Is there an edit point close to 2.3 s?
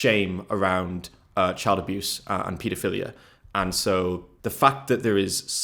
no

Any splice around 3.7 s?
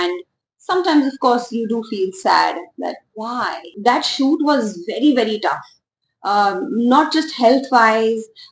yes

